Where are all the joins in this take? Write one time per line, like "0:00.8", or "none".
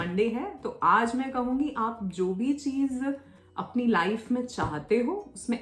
none